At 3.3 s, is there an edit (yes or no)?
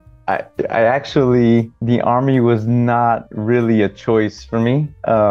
no